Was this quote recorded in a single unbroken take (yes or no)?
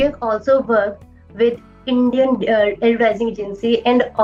yes